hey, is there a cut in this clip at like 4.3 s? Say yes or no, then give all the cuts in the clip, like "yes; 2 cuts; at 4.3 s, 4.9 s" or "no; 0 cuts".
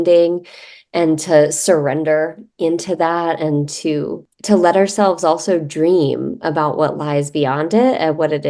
yes; 1 cut; at 4.3 s